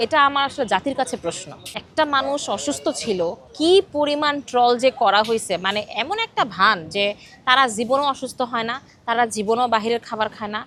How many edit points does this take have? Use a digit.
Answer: 0